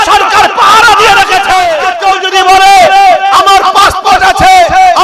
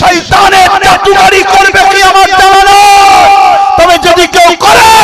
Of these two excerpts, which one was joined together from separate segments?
first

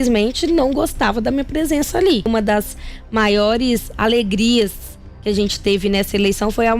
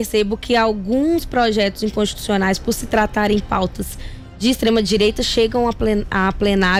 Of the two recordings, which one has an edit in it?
first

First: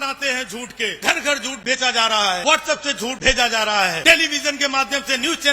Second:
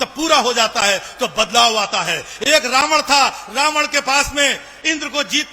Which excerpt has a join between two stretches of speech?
first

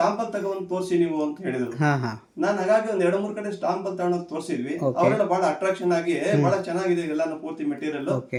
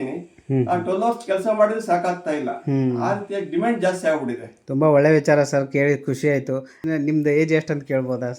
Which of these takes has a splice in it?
second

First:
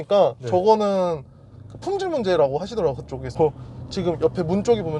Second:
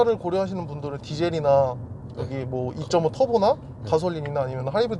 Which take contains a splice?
first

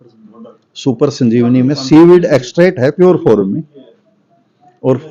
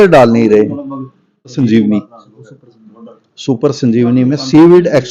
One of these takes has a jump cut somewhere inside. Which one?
second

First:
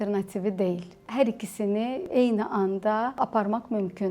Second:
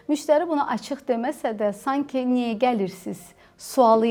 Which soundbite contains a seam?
first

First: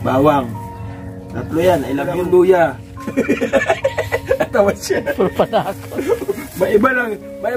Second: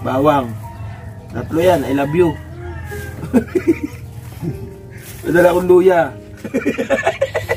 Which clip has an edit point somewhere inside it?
first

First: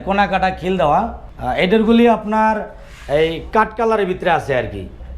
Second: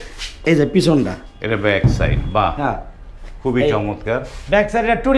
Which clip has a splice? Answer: first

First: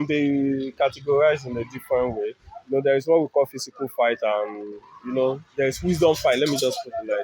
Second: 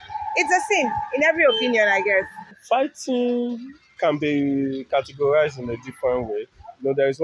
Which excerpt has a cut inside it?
second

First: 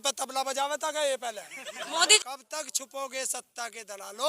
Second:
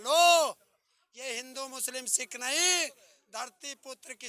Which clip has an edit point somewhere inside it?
first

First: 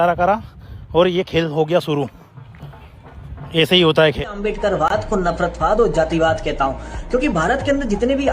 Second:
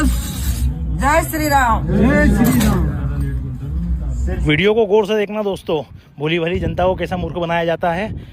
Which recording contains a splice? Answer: first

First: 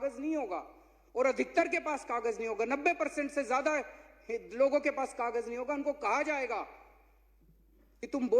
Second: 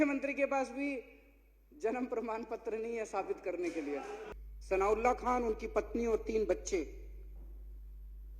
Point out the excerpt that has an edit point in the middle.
second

